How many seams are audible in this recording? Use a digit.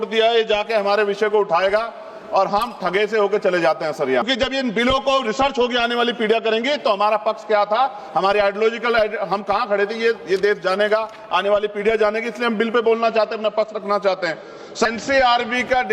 2